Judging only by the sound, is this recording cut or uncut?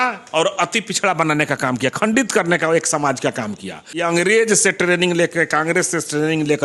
cut